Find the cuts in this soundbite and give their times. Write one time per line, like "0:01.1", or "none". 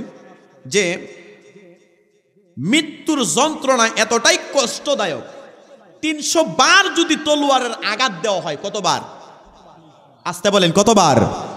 none